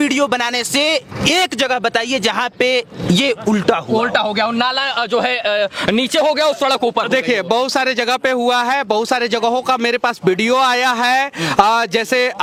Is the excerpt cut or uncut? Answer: uncut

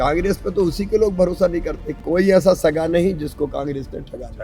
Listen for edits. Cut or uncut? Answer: cut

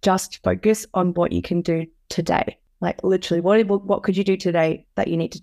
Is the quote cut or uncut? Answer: cut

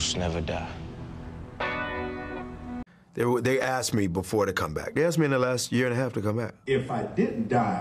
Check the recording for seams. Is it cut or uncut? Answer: cut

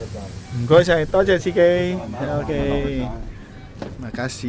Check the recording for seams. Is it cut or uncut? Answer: uncut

